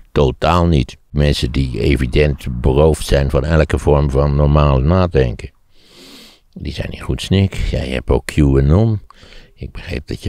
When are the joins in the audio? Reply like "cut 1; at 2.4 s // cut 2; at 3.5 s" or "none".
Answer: cut 1; at 1.1 s